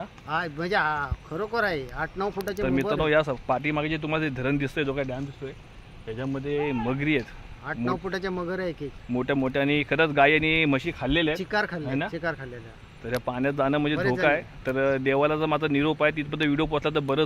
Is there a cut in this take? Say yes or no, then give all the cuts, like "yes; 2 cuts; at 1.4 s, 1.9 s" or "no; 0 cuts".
no; 0 cuts